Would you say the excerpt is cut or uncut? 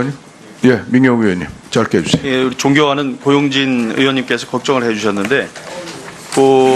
uncut